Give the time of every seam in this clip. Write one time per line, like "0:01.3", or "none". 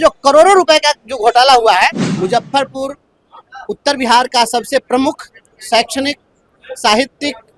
0:02.1